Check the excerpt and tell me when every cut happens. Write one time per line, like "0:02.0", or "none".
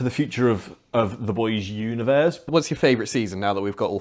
0:02.4